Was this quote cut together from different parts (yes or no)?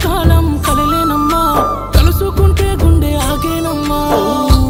no